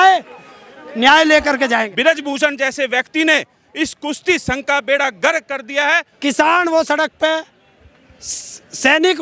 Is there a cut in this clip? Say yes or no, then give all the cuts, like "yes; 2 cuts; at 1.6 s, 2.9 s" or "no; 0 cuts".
yes; 2 cuts; at 1.9 s, 6.1 s